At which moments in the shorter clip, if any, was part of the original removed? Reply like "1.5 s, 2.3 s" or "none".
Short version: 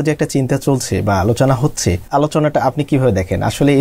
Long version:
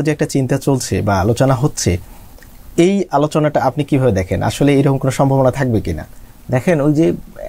2.1 s